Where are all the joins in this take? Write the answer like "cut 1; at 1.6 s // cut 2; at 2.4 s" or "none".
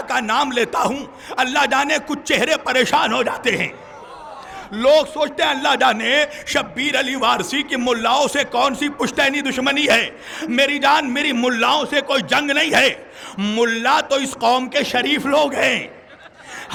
none